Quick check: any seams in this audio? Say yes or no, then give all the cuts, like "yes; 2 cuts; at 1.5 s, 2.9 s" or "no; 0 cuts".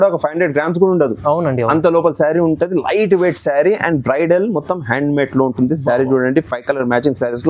no; 0 cuts